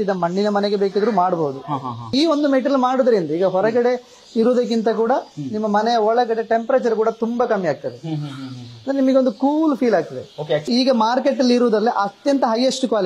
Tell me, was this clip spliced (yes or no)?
yes